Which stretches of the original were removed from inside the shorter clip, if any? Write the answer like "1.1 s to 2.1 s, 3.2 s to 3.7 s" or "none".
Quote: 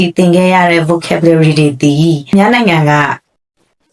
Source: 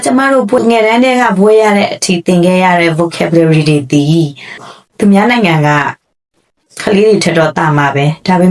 4.4 s to 5.1 s